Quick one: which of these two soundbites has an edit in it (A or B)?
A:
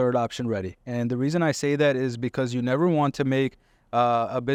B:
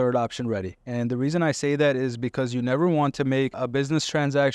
B